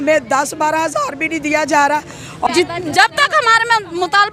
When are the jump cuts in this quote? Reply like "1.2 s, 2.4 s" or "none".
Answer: 2.5 s